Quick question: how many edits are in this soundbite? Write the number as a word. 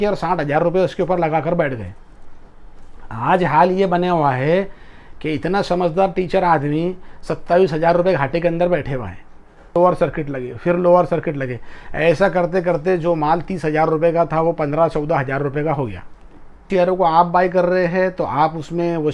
two